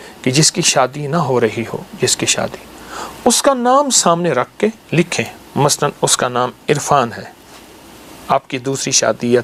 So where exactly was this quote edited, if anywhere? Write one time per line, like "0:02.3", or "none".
none